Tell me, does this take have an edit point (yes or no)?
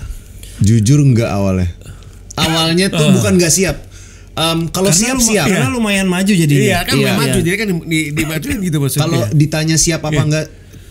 no